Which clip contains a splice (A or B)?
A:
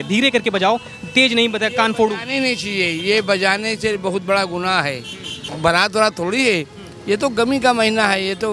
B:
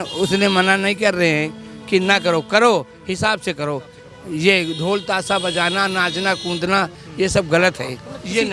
A